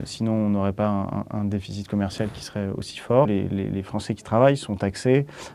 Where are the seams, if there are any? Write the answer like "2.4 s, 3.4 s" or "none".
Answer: 3.3 s